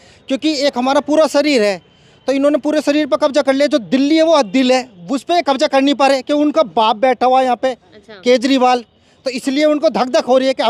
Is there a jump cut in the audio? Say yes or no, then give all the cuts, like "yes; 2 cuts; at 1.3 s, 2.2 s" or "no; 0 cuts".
no; 0 cuts